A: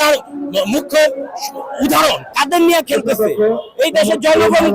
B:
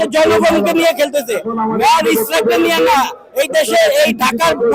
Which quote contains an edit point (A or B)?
A